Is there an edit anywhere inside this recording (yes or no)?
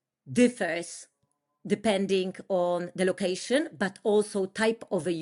no